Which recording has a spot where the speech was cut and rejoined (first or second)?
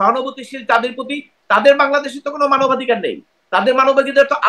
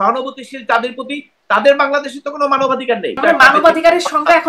second